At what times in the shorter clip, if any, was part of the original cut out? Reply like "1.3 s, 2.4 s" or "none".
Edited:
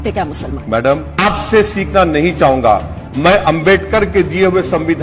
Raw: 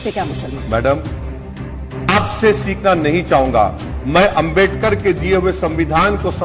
1.1 s